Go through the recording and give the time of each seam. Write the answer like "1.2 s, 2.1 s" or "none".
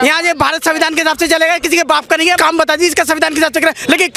2.4 s